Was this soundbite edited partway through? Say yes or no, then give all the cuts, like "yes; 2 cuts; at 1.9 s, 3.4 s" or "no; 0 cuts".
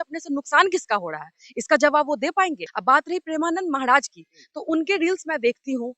yes; 1 cut; at 2.7 s